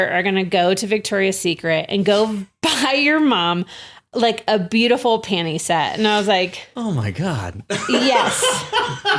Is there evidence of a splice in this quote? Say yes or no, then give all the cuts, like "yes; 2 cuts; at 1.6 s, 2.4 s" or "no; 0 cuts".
no; 0 cuts